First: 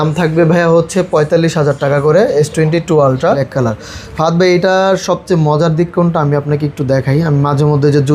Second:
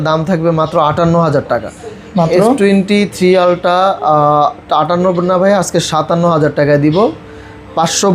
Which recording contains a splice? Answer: first; 1 cut; at 3.4 s

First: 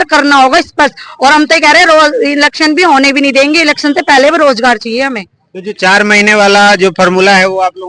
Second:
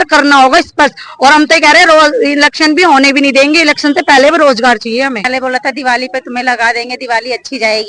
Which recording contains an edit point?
second; 1 cut; at 5.3 s

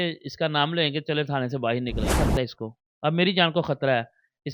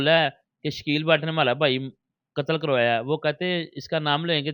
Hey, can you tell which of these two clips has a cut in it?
first; 1 cut; at 2.1 s

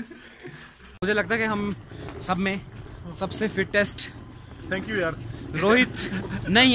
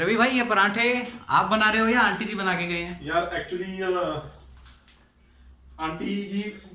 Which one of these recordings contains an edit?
first; 1 cut; at 1.0 s

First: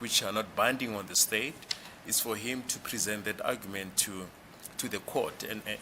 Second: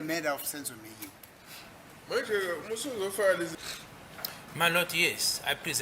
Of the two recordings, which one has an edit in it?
second; 1 cut; at 3.9 s

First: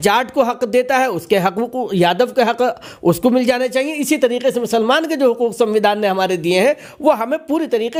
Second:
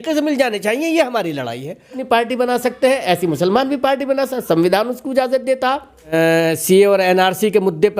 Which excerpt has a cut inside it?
second; 2 cuts; at 2.0 s, 6.1 s

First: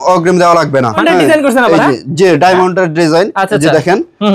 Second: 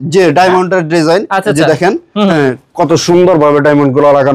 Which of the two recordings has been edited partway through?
first; 1 cut; at 1.0 s

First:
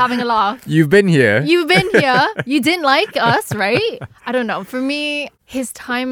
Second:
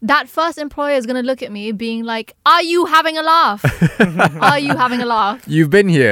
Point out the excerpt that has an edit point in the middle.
first; 1 cut; at 4.1 s

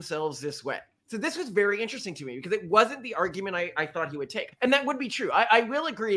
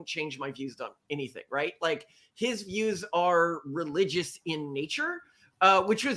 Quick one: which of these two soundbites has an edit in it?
first; 2 cuts; at 1.1 s, 4.5 s

